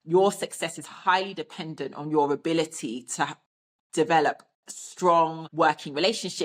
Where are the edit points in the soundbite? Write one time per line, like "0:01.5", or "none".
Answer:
0:05.4